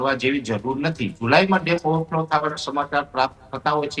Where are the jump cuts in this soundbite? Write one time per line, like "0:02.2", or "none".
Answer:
0:01.2